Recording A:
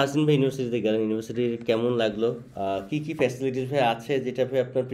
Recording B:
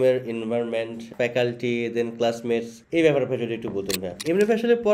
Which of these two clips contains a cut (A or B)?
B